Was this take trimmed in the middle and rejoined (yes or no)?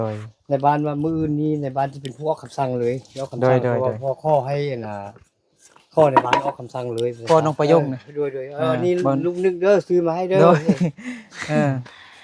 yes